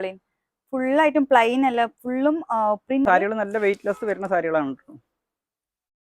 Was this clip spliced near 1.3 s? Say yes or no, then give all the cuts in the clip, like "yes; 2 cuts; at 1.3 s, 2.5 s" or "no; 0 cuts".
no; 1 cut; at 3.1 s